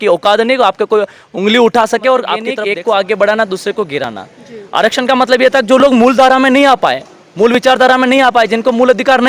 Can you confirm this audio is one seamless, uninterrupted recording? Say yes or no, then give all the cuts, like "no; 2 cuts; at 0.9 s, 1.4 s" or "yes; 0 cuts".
no; 1 cut; at 2.5 s